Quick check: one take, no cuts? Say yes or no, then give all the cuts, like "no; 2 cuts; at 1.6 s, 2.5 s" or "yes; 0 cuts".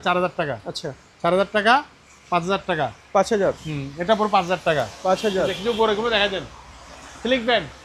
yes; 0 cuts